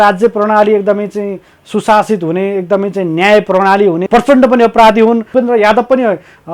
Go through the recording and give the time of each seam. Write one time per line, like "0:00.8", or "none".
0:04.0
0:05.3